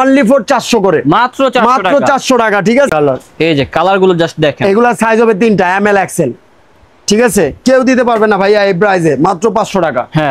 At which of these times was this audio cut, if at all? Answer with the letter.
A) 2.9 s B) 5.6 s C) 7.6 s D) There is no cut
A